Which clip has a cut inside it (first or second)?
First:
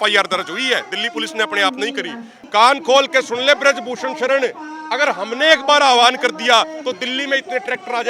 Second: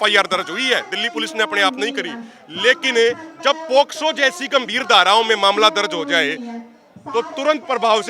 first